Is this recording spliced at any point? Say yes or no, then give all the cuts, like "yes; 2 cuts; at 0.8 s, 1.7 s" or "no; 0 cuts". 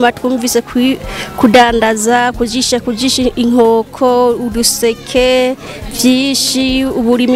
no; 0 cuts